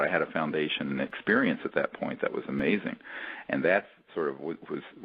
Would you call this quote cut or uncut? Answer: cut